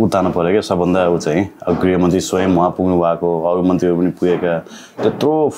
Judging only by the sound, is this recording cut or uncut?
uncut